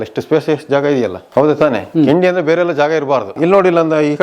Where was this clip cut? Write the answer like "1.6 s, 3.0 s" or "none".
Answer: 1.2 s, 3.3 s